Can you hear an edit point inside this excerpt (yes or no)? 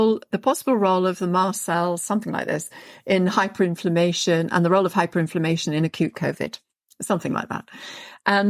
no